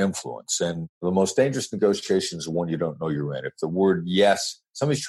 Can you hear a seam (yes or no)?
yes